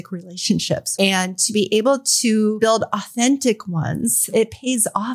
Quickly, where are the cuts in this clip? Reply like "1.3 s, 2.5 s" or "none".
0.9 s, 2.7 s, 4.3 s